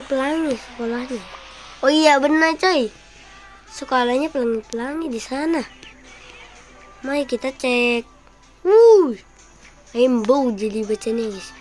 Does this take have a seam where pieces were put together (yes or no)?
no